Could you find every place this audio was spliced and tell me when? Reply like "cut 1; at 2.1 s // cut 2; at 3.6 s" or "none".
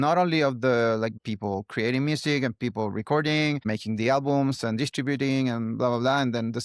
cut 1; at 1.2 s